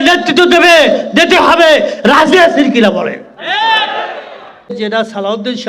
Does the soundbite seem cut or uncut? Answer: cut